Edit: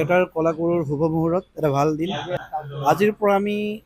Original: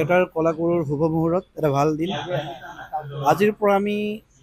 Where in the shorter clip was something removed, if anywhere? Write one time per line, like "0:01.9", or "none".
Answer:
0:02.4